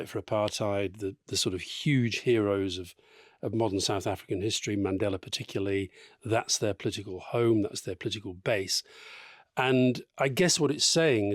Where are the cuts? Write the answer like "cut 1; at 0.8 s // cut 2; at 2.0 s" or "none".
none